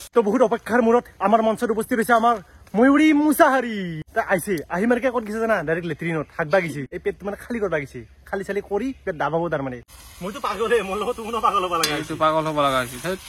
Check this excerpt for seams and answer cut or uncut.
cut